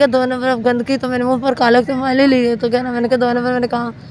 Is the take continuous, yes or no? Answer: yes